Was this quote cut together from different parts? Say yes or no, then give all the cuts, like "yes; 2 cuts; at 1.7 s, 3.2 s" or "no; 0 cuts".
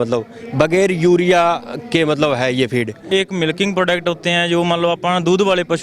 yes; 1 cut; at 3.1 s